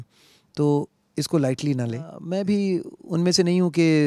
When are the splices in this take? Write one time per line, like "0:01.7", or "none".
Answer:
0:02.2